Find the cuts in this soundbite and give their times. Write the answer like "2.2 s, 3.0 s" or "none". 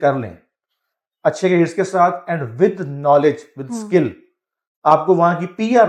none